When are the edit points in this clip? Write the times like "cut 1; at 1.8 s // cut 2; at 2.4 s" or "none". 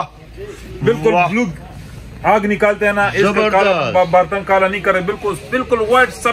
none